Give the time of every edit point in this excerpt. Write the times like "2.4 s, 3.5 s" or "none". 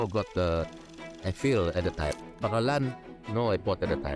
2.3 s